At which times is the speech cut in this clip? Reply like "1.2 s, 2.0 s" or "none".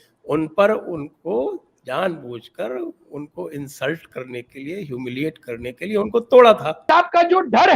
6.9 s